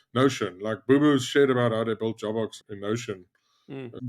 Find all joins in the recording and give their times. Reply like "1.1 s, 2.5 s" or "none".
2.6 s